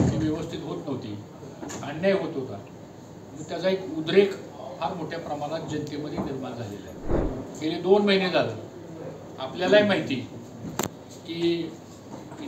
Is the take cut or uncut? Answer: cut